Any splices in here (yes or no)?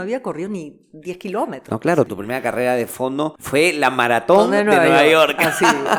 no